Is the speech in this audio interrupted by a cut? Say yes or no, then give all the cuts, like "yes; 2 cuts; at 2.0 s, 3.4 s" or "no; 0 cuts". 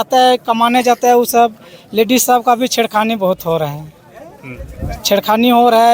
no; 0 cuts